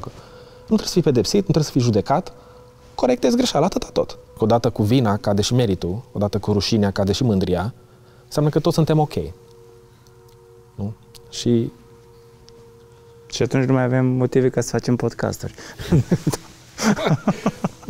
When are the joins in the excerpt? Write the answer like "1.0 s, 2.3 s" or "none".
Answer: 4.4 s